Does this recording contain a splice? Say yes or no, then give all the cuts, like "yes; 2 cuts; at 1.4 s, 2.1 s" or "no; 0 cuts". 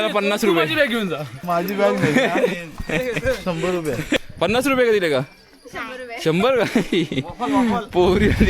yes; 2 cuts; at 1.3 s, 4.2 s